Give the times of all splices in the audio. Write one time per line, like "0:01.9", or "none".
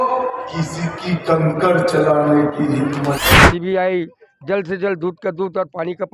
0:03.2